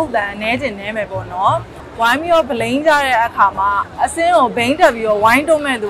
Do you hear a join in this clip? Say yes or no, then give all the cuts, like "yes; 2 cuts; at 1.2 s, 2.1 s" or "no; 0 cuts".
yes; 2 cuts; at 1.8 s, 3.8 s